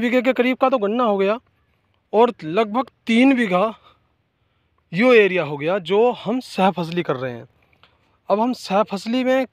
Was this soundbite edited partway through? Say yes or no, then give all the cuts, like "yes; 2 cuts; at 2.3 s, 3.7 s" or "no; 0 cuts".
no; 0 cuts